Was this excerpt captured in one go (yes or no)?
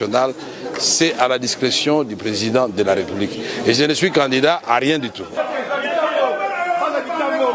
yes